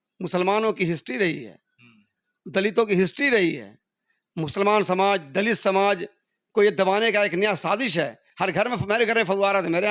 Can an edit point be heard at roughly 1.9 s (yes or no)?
no